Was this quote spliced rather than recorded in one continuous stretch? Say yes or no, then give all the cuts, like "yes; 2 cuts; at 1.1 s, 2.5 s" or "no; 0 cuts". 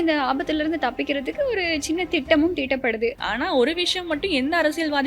yes; 1 cut; at 3.2 s